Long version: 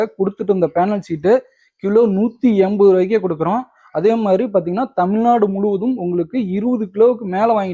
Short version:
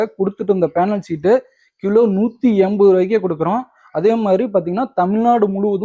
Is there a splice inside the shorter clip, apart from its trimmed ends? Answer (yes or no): no